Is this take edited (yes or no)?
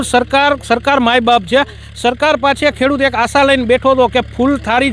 no